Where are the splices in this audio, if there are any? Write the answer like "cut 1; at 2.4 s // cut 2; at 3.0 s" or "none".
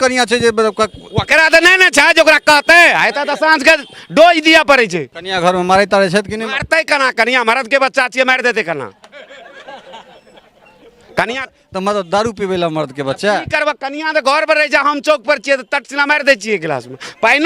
cut 1; at 5.2 s